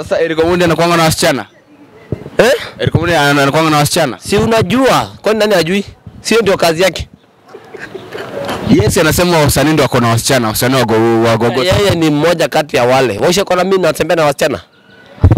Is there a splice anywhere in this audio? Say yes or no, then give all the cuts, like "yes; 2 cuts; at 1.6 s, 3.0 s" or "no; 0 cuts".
no; 0 cuts